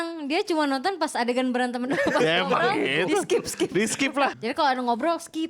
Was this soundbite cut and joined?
yes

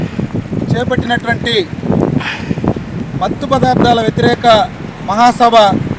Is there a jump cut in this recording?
no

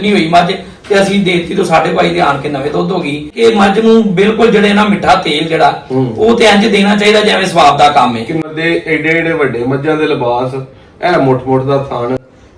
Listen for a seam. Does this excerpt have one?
yes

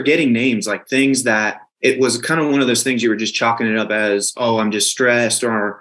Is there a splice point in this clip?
yes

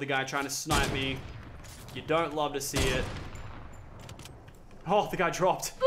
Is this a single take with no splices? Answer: yes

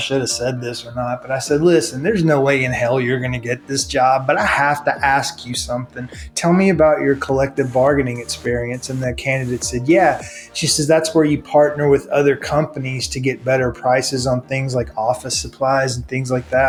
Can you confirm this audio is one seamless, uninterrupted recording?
yes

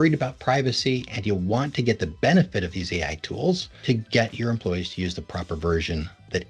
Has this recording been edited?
yes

